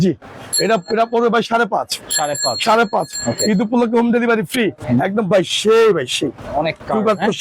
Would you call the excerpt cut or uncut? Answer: cut